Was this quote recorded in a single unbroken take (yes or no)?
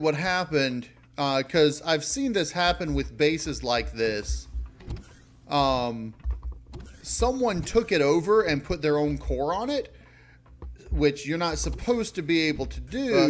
yes